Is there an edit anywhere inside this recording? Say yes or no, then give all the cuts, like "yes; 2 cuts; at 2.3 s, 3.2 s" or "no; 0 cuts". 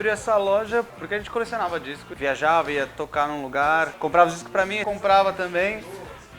yes; 4 cuts; at 1.0 s, 2.1 s, 3.9 s, 4.8 s